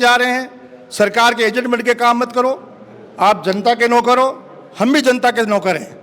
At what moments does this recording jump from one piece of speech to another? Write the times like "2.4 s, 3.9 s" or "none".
none